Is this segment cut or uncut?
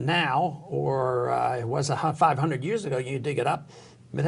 uncut